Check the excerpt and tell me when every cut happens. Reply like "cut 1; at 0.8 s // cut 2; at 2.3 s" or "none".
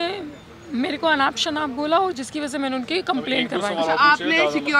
none